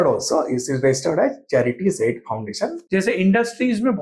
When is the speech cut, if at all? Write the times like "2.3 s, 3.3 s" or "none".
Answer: 2.8 s